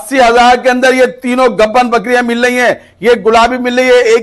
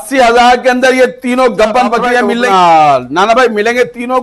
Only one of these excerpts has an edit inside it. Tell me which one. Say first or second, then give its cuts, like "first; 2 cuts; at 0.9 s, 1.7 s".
second; 1 cut; at 2.4 s